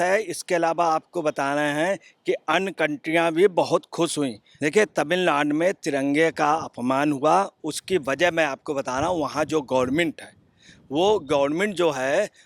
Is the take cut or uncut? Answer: cut